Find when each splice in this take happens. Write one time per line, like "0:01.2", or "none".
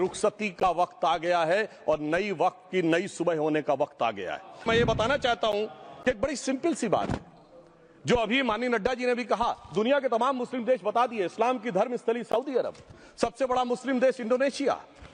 0:04.6